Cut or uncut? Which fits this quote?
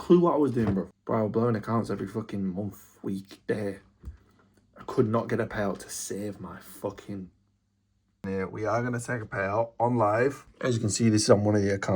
cut